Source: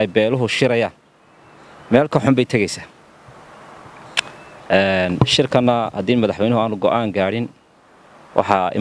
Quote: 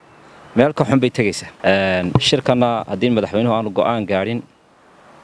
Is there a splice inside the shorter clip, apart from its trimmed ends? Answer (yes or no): yes